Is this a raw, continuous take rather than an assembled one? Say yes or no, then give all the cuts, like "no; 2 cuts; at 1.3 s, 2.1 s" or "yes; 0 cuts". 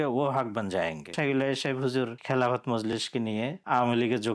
no; 3 cuts; at 1.1 s, 2.2 s, 3.1 s